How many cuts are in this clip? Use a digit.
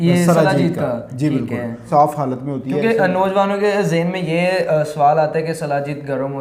1